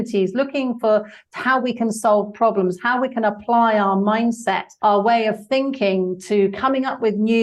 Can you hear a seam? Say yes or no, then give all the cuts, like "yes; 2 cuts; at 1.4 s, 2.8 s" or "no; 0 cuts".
yes; 1 cut; at 4.7 s